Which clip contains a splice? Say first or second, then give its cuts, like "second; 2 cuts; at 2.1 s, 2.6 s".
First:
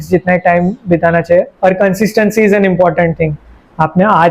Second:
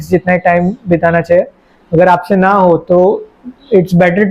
first; 1 cut; at 1.5 s